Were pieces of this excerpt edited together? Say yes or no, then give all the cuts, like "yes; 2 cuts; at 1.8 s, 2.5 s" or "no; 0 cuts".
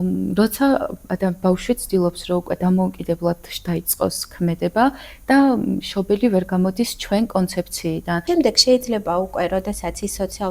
yes; 1 cut; at 8.2 s